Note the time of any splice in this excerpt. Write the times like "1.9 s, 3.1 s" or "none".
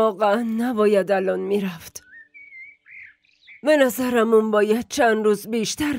none